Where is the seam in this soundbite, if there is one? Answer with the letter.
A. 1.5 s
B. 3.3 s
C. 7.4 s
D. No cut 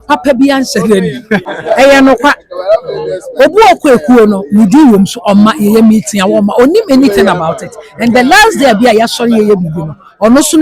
A